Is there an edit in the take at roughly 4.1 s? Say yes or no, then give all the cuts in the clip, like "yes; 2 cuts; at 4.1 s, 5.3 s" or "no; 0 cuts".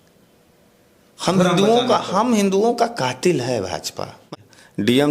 yes; 1 cut; at 4.1 s